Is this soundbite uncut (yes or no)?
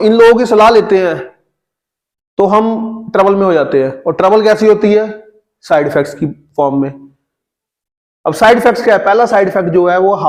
yes